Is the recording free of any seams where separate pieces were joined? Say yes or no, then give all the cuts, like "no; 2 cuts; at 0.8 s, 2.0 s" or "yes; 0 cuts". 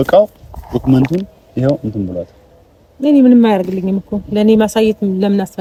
yes; 0 cuts